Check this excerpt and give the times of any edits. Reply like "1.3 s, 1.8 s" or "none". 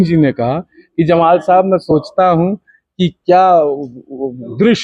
none